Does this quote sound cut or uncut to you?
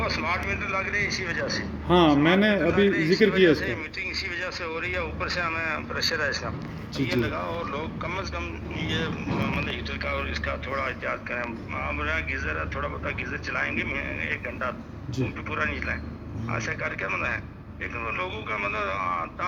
uncut